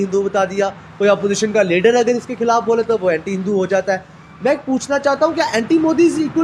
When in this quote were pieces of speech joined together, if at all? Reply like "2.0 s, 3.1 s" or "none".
none